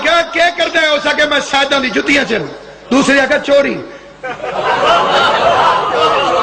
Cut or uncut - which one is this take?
uncut